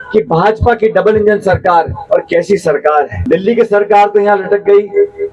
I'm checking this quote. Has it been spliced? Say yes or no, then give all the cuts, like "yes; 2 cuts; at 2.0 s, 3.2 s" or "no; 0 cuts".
yes; 1 cut; at 3.2 s